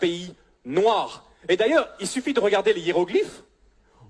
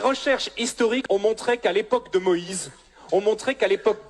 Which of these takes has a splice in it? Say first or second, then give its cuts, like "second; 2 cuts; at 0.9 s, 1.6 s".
second; 1 cut; at 1.0 s